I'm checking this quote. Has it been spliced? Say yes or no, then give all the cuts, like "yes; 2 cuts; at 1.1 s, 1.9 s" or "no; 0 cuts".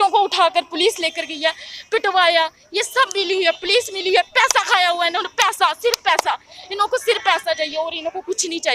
no; 0 cuts